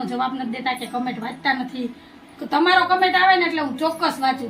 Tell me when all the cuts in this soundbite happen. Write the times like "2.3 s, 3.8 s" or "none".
none